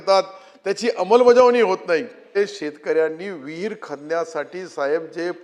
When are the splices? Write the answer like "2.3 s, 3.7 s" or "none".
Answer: 2.3 s